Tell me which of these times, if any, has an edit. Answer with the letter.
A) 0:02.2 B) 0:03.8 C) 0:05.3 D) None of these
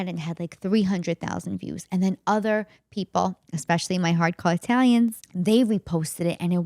C